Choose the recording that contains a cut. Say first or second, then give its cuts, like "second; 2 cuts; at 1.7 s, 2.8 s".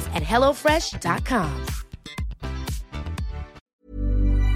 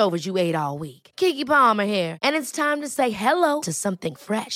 first; 1 cut; at 3.6 s